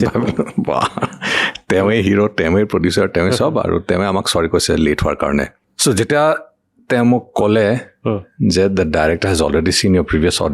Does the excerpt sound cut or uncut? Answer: cut